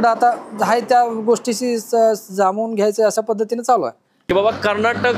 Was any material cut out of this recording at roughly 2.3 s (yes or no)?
no